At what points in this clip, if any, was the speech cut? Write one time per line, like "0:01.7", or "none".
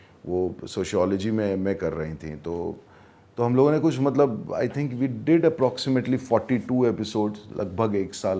none